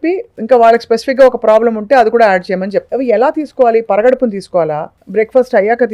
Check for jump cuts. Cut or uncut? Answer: cut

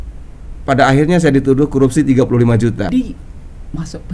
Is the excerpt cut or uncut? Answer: cut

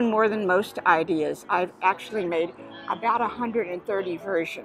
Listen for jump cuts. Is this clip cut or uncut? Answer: uncut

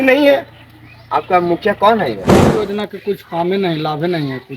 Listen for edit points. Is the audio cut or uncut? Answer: cut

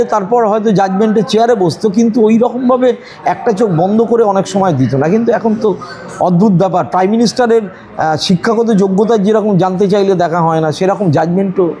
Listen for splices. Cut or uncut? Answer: uncut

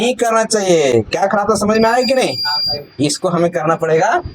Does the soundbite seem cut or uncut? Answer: uncut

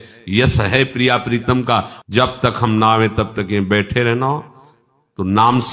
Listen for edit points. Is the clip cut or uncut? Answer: cut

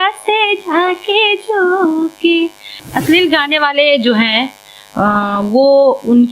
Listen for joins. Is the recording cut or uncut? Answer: cut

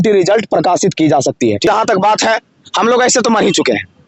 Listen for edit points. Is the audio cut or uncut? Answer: cut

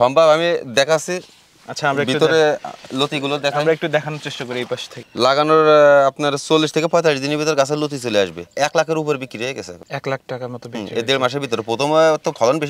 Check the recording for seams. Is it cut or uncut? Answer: cut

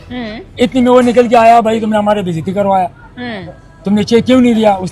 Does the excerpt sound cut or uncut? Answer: uncut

